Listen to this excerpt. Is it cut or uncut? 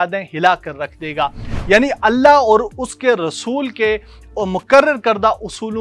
cut